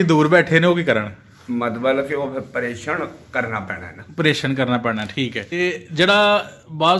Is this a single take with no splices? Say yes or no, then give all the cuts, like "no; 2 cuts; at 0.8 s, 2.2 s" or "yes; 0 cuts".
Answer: no; 1 cut; at 5.6 s